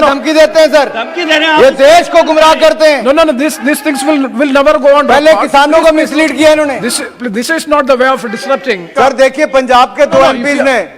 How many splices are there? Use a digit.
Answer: 1